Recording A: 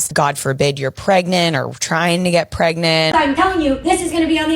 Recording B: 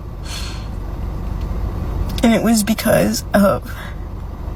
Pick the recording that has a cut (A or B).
A